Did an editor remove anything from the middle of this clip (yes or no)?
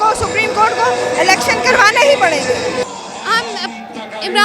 yes